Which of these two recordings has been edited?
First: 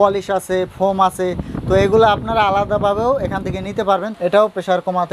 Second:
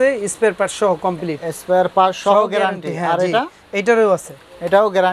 first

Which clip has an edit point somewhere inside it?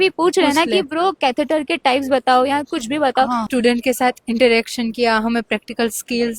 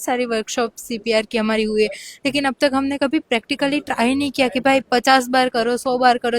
first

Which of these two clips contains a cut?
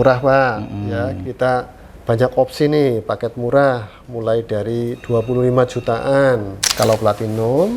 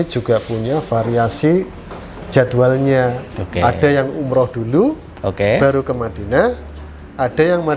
first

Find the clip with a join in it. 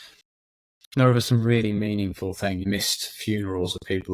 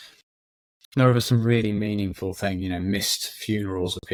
first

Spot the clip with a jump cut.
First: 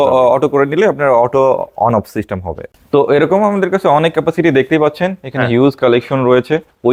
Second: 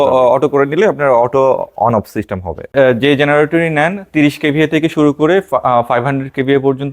second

